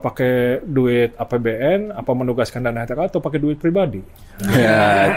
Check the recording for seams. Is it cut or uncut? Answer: uncut